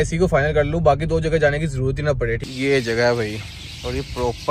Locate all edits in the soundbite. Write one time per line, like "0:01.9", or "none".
0:02.4